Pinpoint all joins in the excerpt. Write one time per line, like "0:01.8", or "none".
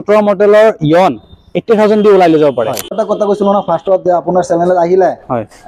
0:03.0